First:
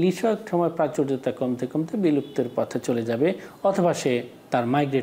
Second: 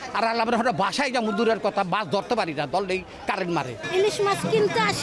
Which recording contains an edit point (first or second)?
second